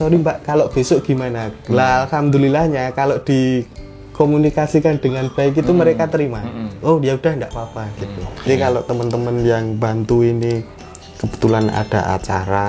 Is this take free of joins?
no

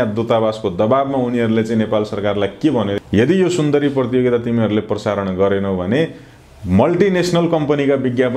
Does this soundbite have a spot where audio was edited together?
yes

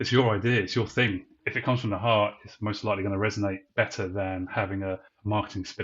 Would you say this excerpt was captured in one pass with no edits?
no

